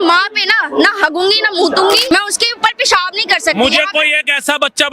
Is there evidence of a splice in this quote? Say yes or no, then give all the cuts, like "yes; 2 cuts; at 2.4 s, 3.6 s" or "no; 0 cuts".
yes; 1 cut; at 2.1 s